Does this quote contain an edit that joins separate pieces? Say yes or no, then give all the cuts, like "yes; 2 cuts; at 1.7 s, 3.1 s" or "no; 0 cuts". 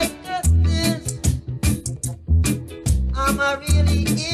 no; 0 cuts